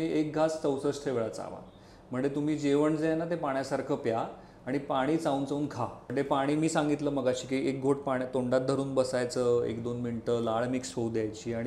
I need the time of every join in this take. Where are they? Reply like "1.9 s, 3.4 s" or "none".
6.0 s